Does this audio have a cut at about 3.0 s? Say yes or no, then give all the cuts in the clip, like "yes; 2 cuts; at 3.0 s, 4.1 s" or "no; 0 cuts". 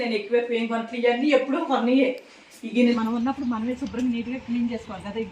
yes; 1 cut; at 3.0 s